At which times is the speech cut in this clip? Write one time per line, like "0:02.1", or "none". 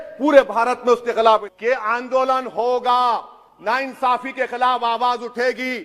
0:01.5